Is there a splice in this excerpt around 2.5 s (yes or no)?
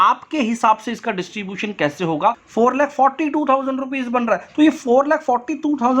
yes